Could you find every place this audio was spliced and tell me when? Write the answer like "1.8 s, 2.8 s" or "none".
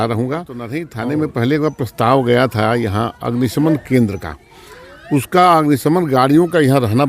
0.9 s